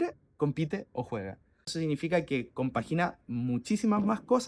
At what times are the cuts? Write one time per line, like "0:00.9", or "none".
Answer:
0:01.7